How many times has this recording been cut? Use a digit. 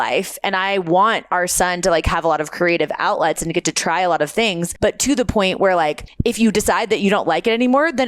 2